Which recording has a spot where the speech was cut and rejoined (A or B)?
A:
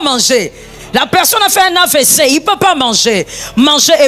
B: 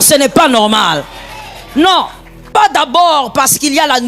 B